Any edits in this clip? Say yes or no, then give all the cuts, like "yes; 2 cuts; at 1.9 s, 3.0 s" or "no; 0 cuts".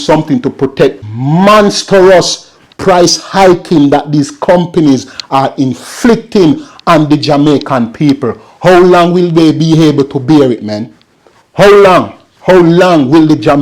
yes; 1 cut; at 1.1 s